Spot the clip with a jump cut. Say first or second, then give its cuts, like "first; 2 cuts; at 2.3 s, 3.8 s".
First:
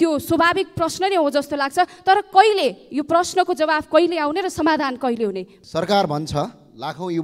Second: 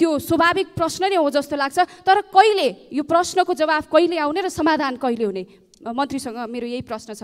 first; 1 cut; at 5.5 s